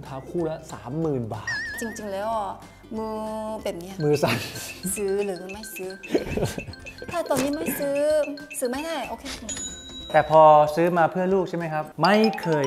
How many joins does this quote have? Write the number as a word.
two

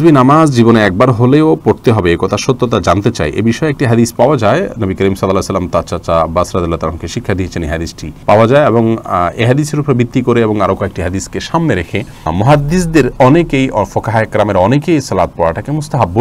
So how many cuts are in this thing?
zero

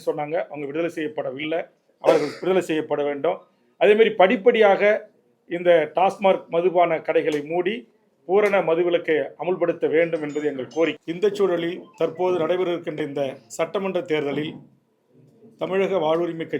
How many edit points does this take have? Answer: one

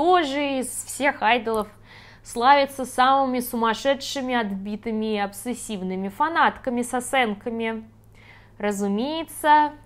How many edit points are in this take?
zero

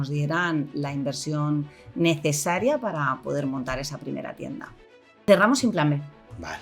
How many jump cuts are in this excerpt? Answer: one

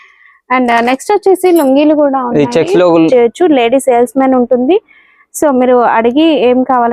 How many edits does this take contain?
one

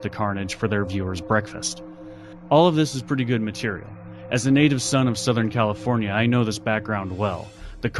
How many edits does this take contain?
one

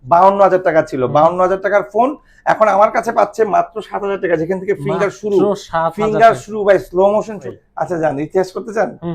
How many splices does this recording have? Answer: one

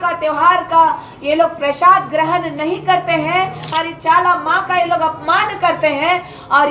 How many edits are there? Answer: one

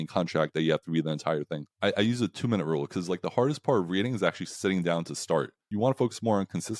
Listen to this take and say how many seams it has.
two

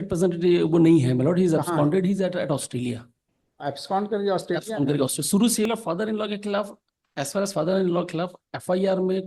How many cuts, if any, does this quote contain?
one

